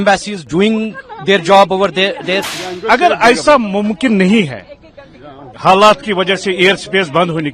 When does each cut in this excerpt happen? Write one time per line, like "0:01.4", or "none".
0:02.5